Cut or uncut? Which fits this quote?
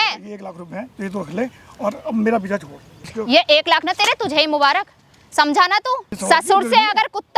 cut